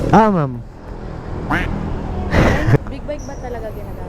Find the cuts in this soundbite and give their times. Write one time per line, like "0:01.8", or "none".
0:02.8